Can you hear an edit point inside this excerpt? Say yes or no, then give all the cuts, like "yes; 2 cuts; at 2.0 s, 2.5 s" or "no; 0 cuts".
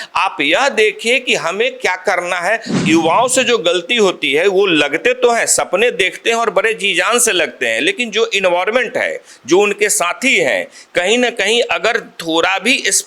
yes; 1 cut; at 2.7 s